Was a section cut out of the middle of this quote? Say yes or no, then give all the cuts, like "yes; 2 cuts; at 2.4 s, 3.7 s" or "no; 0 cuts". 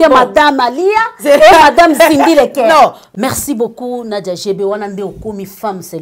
yes; 1 cut; at 3.1 s